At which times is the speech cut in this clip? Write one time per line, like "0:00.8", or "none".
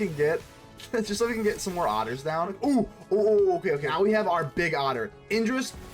0:02.5
0:03.9

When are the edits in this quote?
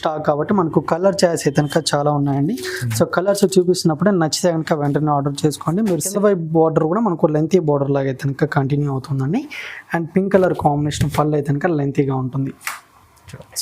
0:06.1

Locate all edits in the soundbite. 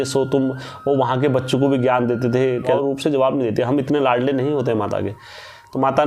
0:02.7

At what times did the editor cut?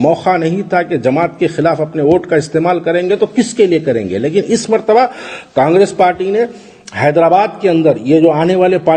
none

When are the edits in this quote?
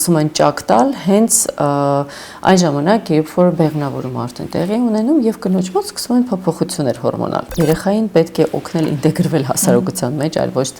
0:07.5

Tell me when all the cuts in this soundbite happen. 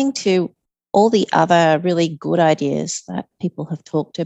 none

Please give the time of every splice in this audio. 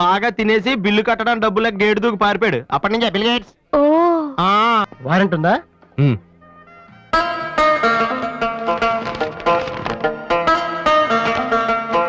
0:05.0

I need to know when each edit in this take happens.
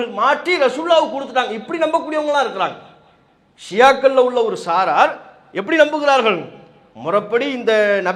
none

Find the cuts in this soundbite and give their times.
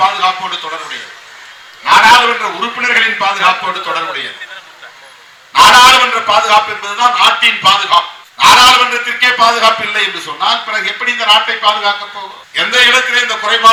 none

